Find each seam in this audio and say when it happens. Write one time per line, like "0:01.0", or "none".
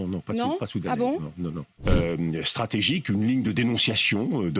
0:01.7